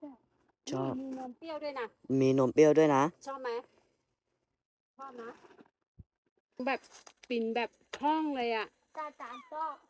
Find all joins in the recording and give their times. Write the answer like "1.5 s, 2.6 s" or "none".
6.6 s